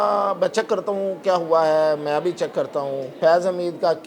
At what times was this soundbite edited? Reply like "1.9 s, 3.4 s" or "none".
3.1 s

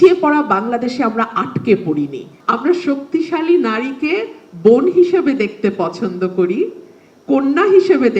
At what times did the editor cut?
2.3 s

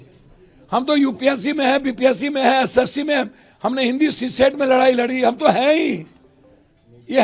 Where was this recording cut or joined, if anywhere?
none

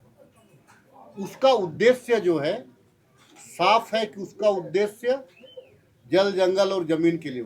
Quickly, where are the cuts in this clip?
none

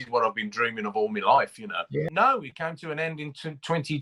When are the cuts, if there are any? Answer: 2.1 s

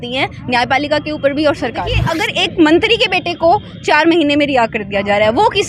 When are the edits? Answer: 2.1 s

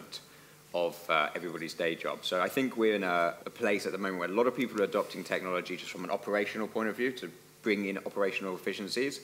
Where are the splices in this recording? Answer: 3.5 s

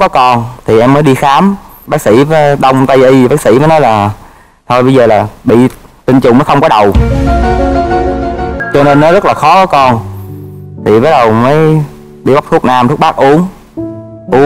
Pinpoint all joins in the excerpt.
8.6 s

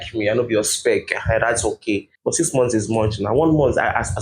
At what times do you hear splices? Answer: 2.1 s

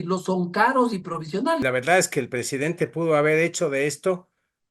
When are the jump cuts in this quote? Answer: 1.6 s

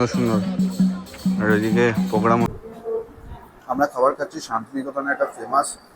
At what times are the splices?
2.5 s

